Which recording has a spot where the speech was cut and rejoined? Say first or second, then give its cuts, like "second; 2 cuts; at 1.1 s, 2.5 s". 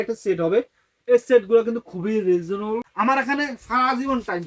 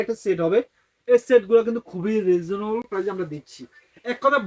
first; 1 cut; at 2.9 s